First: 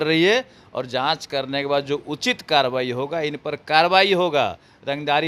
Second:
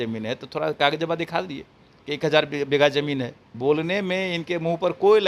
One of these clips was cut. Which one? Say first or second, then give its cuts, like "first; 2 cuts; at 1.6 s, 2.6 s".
second; 1 cut; at 3.4 s